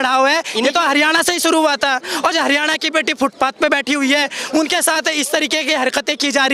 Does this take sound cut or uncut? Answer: uncut